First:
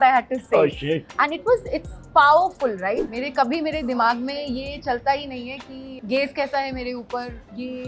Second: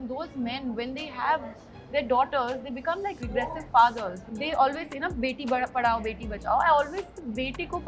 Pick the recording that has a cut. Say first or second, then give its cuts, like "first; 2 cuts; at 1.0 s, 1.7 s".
first; 1 cut; at 3.0 s